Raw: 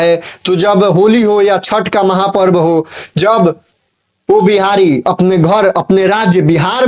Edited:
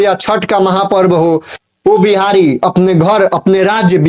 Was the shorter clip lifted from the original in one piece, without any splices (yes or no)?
no